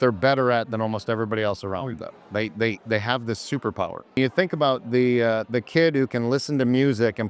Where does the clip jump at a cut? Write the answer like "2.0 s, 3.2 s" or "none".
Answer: 4.2 s